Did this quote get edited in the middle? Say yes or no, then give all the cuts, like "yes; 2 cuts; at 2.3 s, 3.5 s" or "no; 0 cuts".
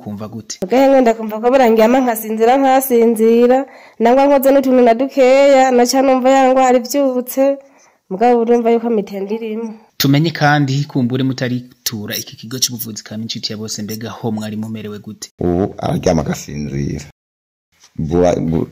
yes; 1 cut; at 15.2 s